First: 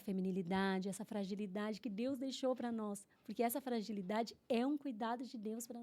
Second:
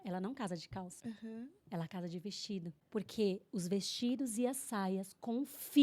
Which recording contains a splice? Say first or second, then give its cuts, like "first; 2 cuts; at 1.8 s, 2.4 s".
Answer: second; 2 cuts; at 0.9 s, 2.8 s